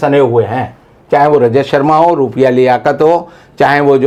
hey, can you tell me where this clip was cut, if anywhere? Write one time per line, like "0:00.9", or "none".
none

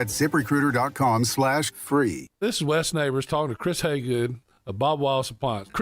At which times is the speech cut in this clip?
0:02.3

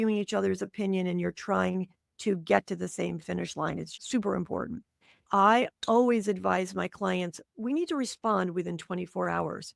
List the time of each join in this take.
0:05.2

